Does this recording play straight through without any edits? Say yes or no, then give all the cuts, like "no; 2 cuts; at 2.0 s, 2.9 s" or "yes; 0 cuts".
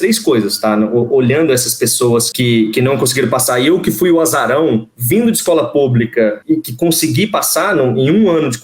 no; 1 cut; at 2.3 s